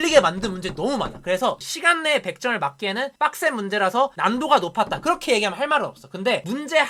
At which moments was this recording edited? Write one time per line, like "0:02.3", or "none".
none